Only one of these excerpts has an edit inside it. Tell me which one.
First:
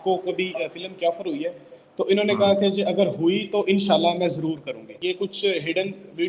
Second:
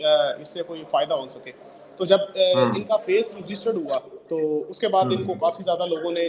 first; 1 cut; at 4.9 s

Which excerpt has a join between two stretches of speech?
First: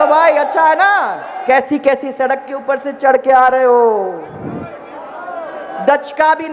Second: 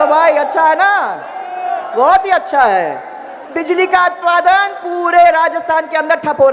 first; 1 cut; at 1.2 s

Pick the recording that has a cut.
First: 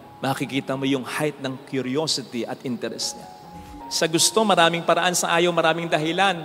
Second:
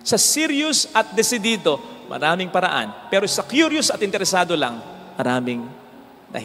first; 1 cut; at 3.6 s

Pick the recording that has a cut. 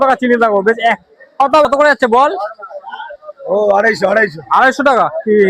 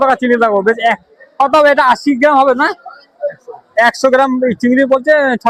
first; 1 cut; at 1.6 s

